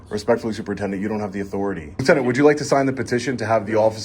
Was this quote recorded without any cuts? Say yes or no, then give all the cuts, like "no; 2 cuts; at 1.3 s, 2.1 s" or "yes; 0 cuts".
no; 1 cut; at 2.0 s